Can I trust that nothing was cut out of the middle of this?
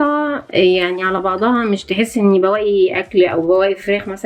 yes; 0 cuts

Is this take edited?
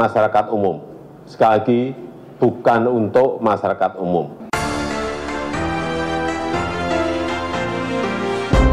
yes; 1 cut; at 4.5 s

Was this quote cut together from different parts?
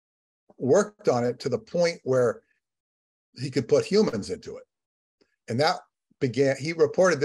no; 0 cuts

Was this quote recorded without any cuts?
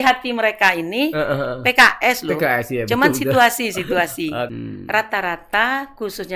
no; 1 cut; at 4.5 s

